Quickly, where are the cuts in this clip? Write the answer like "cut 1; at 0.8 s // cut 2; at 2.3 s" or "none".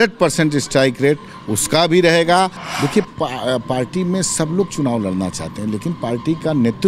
cut 1; at 2.6 s